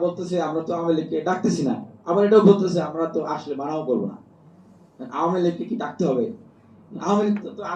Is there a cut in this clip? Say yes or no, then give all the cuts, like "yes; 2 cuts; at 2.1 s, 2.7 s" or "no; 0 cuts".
no; 0 cuts